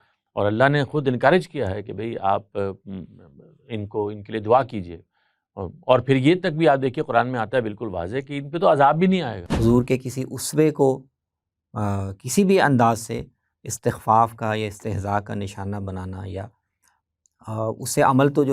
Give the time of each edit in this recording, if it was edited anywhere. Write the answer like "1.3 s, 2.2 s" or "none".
9.4 s